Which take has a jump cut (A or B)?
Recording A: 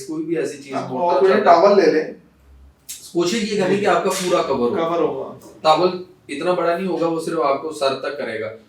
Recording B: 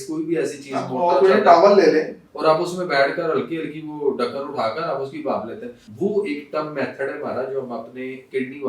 B